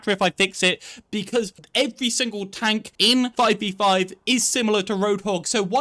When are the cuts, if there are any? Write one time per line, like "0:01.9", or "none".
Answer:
0:01.6
0:03.1